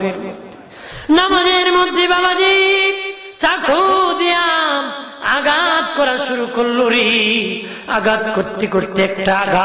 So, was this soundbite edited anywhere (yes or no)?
no